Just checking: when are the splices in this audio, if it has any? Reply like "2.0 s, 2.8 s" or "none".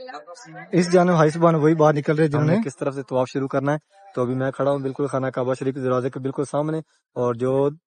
2.7 s